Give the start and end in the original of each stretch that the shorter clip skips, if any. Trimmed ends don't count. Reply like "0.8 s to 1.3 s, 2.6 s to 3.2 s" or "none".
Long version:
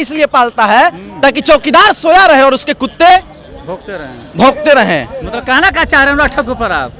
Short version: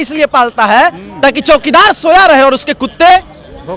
none